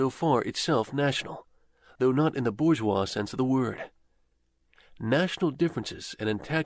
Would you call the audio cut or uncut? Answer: cut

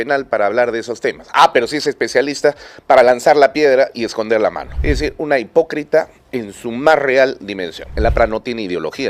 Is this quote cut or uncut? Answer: cut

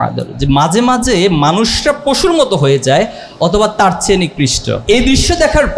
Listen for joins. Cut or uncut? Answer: cut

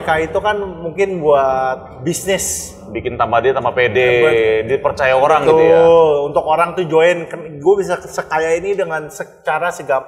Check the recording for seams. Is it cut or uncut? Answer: uncut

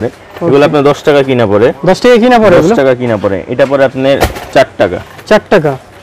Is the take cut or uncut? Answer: uncut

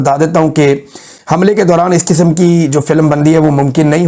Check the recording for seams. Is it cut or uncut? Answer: uncut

